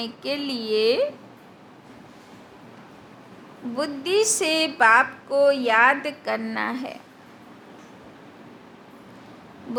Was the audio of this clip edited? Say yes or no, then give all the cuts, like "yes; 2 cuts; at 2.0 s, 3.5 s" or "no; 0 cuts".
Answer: no; 0 cuts